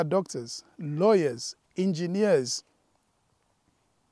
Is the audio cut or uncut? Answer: uncut